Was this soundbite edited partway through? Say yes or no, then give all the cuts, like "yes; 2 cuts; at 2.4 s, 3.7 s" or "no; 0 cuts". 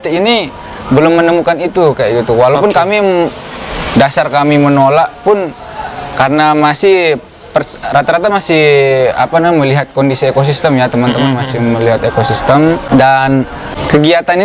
no; 0 cuts